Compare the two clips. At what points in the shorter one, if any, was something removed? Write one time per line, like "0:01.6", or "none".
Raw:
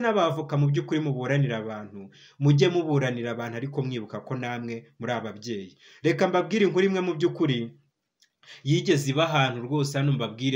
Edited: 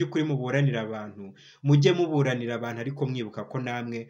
none